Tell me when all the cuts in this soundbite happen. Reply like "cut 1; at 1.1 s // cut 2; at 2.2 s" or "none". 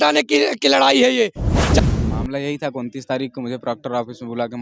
cut 1; at 1.8 s